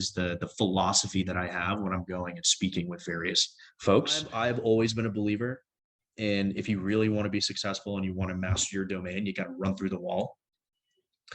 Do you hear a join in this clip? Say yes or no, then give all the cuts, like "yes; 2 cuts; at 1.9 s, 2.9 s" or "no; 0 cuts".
yes; 1 cut; at 4.3 s